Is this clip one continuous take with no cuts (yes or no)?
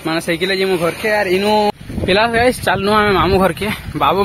no